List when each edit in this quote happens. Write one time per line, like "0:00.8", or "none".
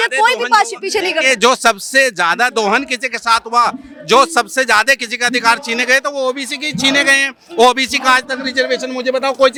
none